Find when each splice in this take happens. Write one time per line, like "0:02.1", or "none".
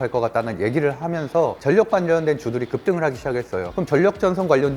0:03.7